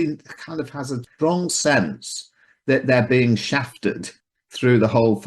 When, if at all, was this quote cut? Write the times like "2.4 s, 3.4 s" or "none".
1.0 s, 4.1 s